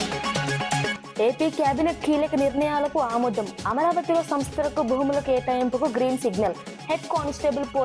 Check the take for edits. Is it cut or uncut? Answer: cut